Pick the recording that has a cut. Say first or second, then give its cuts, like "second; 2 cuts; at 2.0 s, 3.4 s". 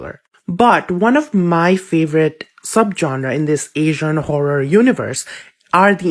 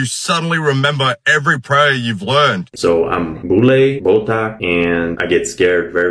second; 1 cut; at 2.7 s